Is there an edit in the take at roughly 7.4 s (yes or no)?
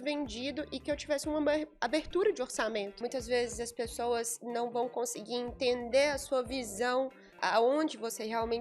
yes